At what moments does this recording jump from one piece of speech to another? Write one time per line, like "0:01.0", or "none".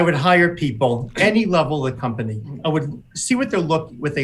0:01.1
0:02.6